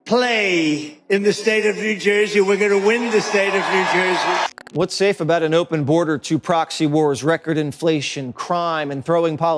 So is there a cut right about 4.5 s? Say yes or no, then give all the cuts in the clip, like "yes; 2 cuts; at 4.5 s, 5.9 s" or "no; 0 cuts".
yes; 1 cut; at 4.5 s